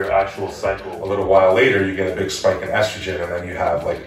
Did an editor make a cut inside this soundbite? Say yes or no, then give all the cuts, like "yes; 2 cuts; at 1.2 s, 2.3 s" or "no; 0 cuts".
yes; 1 cut; at 0.9 s